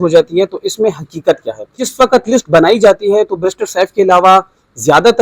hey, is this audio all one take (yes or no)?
no